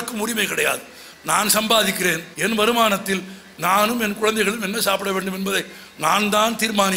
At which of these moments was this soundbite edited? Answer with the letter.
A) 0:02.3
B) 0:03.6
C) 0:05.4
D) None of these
A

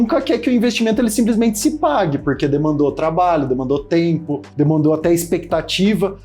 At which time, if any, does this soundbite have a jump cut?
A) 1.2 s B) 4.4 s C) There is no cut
B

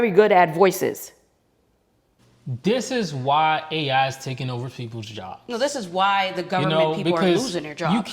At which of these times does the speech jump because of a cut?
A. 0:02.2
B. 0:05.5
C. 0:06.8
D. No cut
A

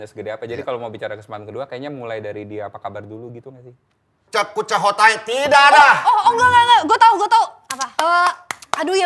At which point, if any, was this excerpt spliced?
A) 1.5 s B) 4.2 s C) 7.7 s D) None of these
B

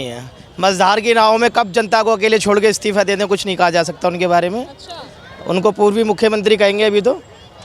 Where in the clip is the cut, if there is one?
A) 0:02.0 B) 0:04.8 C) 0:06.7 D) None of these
D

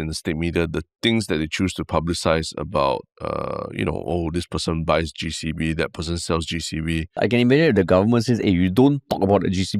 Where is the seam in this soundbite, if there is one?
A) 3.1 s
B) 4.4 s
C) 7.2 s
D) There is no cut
C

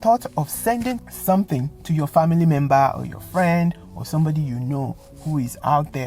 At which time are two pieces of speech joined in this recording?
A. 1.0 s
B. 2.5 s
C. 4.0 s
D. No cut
A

